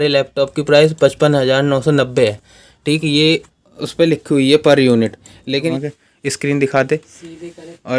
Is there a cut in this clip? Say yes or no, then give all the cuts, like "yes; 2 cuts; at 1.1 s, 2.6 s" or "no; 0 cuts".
yes; 1 cut; at 5.7 s